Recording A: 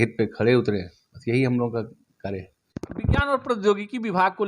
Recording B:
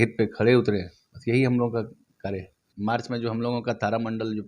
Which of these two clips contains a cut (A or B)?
B